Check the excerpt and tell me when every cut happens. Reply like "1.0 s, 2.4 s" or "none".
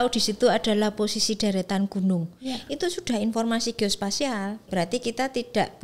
4.7 s